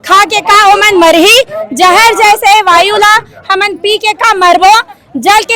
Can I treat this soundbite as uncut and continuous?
yes; 0 cuts

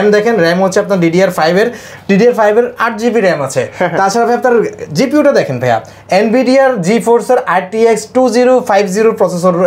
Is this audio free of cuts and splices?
yes; 0 cuts

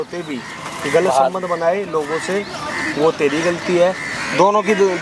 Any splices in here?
no; 0 cuts

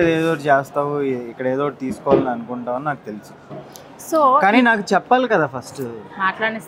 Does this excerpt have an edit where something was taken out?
no; 0 cuts

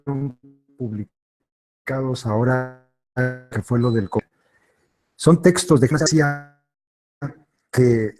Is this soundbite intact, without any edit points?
yes; 0 cuts

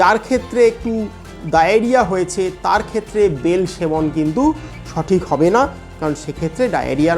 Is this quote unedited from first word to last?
no; 1 cut; at 1.3 s

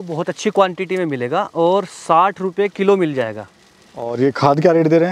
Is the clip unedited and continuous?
no; 1 cut; at 4.1 s

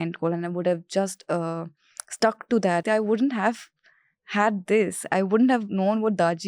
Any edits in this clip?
yes; 1 cut; at 2.8 s

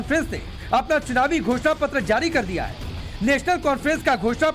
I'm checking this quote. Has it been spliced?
no; 0 cuts

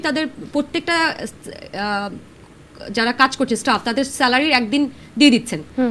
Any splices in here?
no; 0 cuts

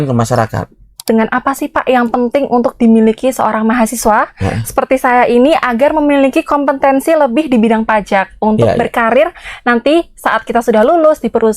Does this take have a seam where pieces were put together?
yes; 1 cut; at 1.1 s

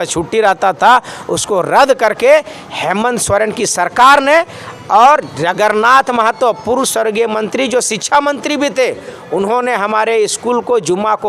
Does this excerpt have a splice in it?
no; 0 cuts

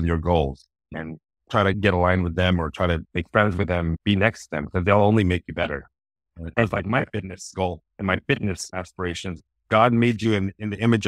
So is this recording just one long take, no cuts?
no; 2 cuts; at 6.3 s, 9.4 s

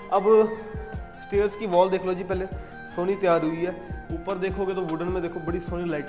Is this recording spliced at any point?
no; 0 cuts

